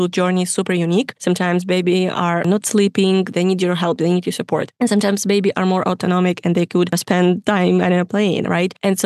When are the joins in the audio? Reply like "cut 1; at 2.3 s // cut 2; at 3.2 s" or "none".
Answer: cut 1; at 2.4 s